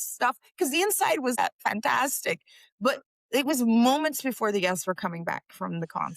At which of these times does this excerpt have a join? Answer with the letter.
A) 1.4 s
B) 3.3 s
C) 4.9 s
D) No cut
A